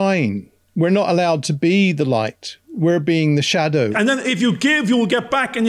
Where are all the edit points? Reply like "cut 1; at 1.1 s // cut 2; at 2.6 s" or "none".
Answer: cut 1; at 3.9 s